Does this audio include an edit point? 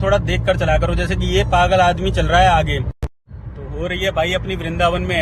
yes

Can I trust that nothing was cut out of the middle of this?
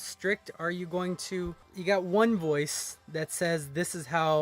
no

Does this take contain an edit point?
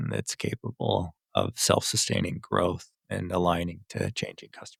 no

